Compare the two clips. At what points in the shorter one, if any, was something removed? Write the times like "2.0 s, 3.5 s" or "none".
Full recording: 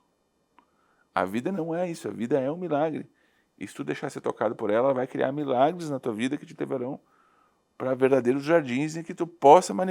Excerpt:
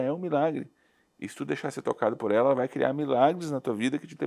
none